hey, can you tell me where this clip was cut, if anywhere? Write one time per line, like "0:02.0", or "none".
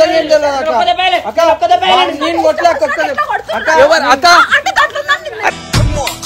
none